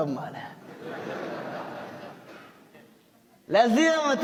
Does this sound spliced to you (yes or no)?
no